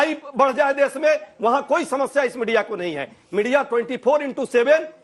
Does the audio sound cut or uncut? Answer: uncut